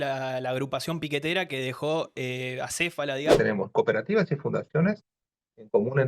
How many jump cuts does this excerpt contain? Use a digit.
1